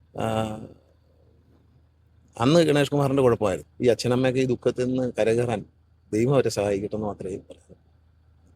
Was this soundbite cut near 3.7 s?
yes; 1 cut; at 3.7 s

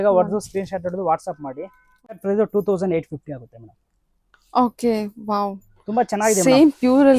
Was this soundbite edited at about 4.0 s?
no; 1 cut; at 2.2 s

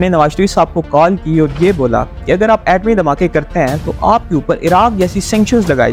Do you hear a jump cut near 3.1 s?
no; 0 cuts

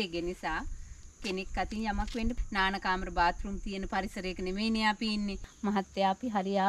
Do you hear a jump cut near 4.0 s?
no; 2 cuts; at 2.4 s, 5.4 s

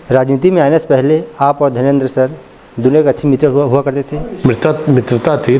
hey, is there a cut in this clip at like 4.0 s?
yes; 1 cut; at 4.0 s

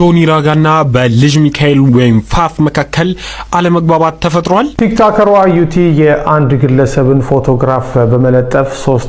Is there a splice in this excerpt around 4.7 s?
yes; 1 cut; at 4.7 s

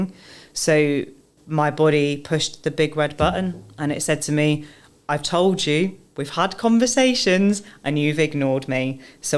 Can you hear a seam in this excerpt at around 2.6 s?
no; 1 cut; at 1.4 s

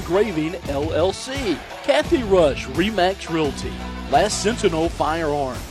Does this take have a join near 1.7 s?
yes; 1 cut; at 1.7 s

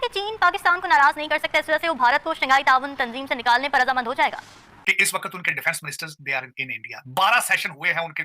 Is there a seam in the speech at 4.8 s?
yes; 1 cut; at 4.8 s

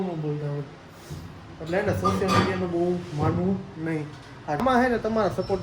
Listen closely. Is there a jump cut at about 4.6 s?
yes; 1 cut; at 4.6 s

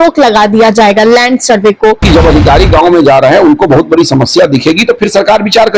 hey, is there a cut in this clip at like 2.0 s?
yes; 1 cut; at 2.0 s

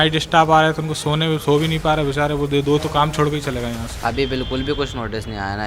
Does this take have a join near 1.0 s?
no; 1 cut; at 3.9 s

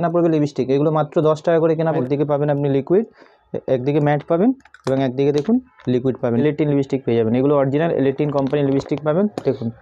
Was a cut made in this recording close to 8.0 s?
no; 2 cuts; at 2.0 s, 6.4 s

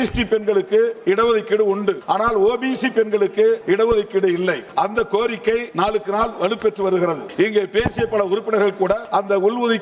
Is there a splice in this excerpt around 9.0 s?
yes; 7 cuts; at 1.0 s, 2.0 s, 3.6 s, 4.6 s, 5.7 s, 7.2 s, 9.0 s

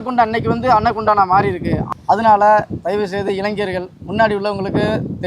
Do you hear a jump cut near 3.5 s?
no; 1 cut; at 1.8 s

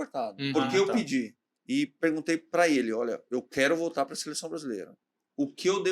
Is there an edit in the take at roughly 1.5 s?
yes; 1 cut; at 1.5 s

